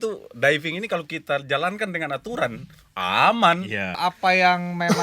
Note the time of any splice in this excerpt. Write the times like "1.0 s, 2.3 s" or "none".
4.0 s